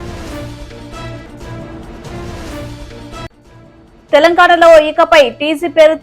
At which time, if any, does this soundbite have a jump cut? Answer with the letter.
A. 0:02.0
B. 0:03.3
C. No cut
B